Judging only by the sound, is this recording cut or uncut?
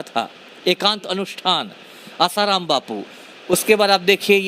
uncut